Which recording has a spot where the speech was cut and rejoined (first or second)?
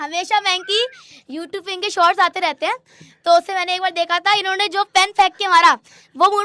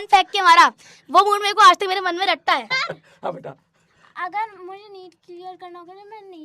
second